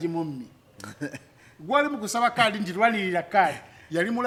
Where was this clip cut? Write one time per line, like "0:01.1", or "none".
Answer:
none